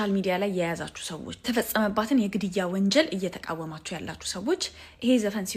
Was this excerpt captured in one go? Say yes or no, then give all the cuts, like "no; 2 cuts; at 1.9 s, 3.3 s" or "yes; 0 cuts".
yes; 0 cuts